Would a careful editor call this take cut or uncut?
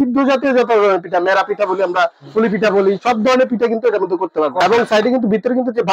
cut